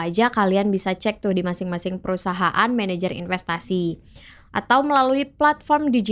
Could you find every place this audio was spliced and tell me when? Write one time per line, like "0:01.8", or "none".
none